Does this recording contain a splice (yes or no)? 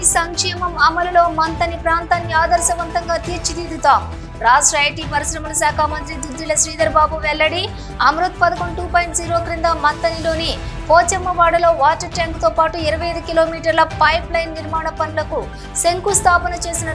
no